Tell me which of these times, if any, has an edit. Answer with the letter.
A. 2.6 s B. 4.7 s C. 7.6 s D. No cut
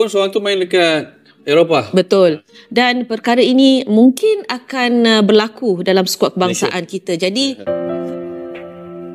C